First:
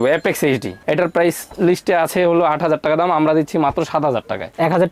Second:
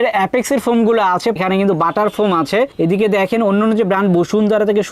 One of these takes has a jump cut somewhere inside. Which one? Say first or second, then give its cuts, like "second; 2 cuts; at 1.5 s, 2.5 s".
second; 1 cut; at 1.4 s